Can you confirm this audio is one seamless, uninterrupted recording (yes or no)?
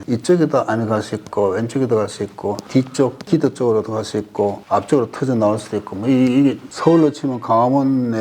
yes